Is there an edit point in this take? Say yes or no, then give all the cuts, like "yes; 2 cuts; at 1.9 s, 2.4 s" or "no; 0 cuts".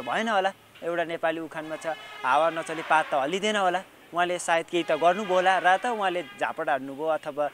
no; 0 cuts